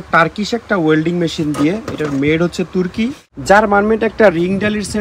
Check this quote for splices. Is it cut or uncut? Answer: cut